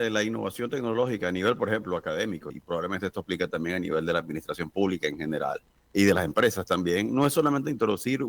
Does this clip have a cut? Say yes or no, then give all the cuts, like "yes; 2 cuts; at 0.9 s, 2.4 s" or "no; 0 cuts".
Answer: yes; 2 cuts; at 2.5 s, 5.7 s